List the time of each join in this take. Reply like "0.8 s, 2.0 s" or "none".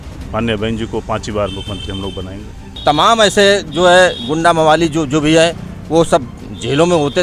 2.7 s